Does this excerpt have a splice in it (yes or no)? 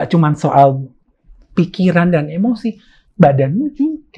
no